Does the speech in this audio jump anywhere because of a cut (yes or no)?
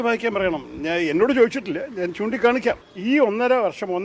yes